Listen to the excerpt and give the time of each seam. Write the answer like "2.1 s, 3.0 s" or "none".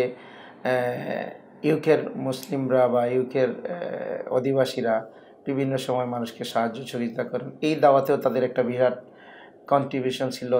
none

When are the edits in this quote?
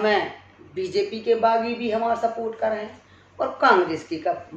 none

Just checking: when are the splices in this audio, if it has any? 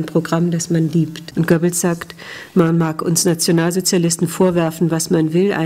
1.2 s

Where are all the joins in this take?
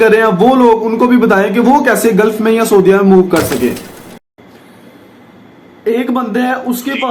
4.2 s

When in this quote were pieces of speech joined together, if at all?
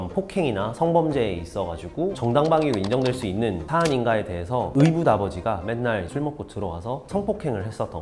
none

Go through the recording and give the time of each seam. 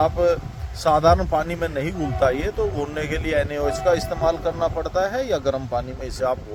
none

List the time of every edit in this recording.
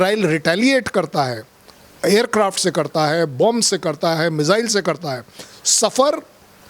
none

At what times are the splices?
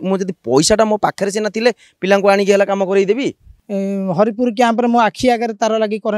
3.6 s

